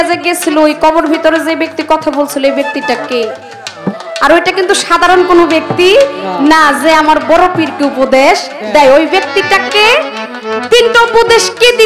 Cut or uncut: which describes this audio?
uncut